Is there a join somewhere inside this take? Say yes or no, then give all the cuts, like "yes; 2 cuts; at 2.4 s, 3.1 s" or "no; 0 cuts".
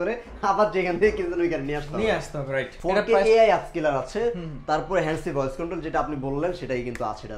yes; 1 cut; at 2.7 s